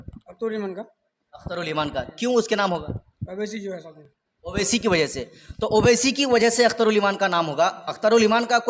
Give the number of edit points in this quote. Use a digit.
0